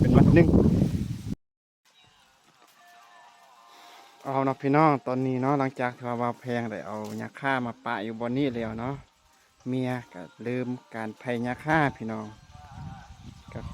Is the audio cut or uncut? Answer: cut